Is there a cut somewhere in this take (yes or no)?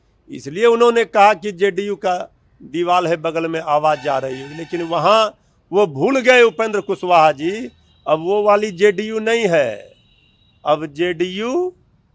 no